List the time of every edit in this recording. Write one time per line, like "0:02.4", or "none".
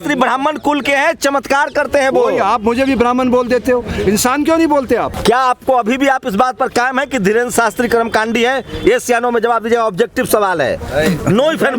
0:05.1